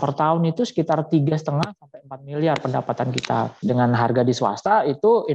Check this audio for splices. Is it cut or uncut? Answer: cut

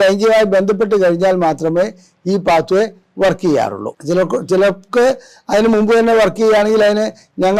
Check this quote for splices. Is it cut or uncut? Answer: uncut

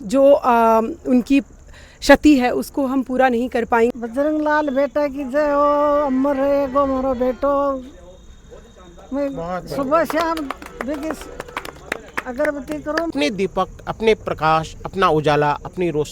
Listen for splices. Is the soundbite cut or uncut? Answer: cut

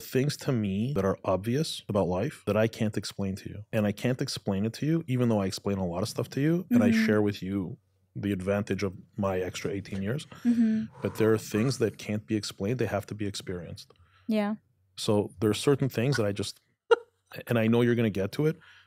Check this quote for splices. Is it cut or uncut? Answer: cut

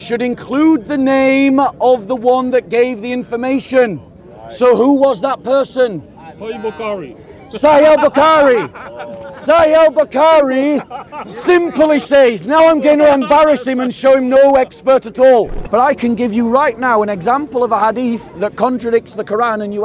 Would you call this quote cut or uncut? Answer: cut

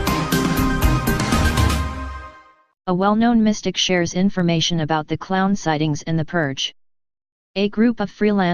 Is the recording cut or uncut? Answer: uncut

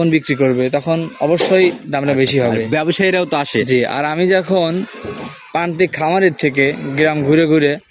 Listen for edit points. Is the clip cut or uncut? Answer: uncut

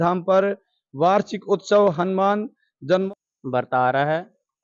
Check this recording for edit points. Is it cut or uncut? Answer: cut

